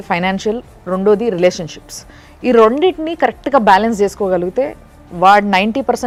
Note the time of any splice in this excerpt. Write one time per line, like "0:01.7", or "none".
none